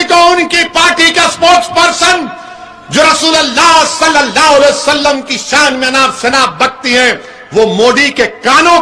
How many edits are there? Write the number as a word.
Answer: zero